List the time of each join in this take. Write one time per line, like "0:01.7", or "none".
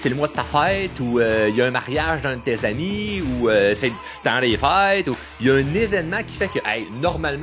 none